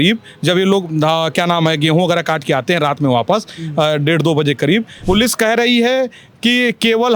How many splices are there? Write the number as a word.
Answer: one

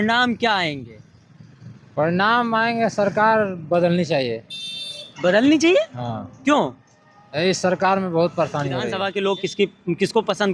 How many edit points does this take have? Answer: one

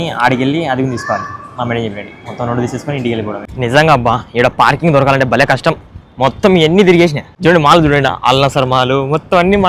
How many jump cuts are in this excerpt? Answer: two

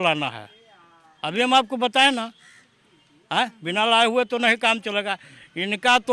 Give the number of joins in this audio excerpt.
zero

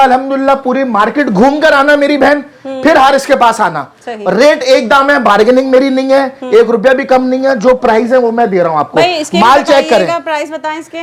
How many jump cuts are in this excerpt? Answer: zero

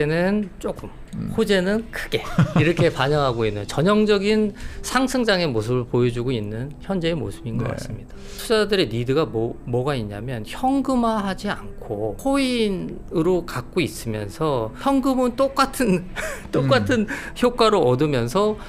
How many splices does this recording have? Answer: three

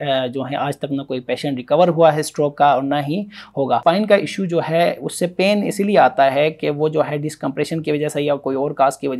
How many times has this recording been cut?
one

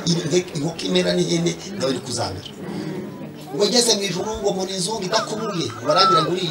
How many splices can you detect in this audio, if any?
one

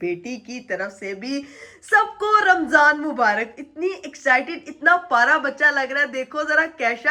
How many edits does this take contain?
zero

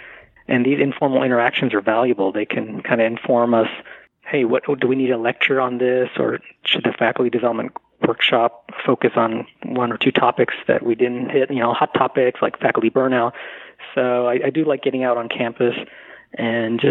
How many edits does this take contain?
zero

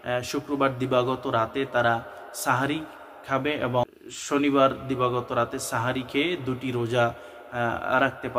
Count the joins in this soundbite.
one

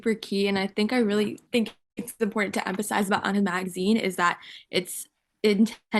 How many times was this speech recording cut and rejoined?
one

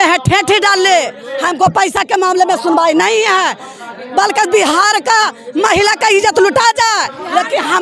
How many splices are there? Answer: zero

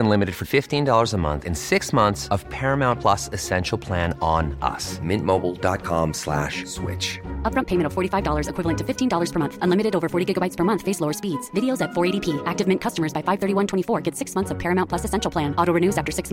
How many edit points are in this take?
zero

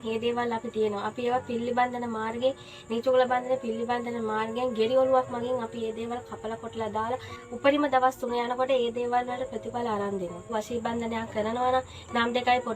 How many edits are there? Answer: two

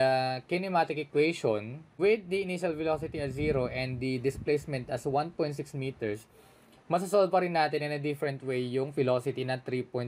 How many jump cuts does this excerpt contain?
zero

